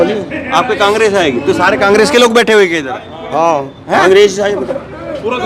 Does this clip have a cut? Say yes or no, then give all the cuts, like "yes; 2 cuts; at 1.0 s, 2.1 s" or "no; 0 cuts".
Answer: no; 0 cuts